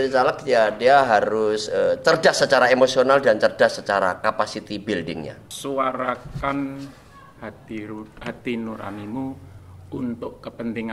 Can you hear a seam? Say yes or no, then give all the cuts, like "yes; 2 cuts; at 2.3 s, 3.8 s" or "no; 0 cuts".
yes; 1 cut; at 5.4 s